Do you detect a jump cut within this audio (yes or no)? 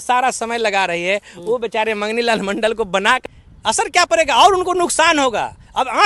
yes